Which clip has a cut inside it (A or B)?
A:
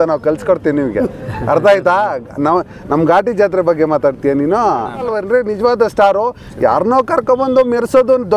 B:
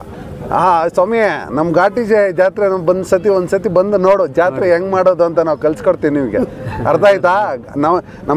A